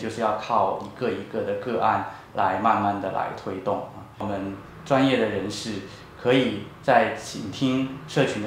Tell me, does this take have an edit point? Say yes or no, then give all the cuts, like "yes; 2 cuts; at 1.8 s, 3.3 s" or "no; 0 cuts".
yes; 1 cut; at 4.1 s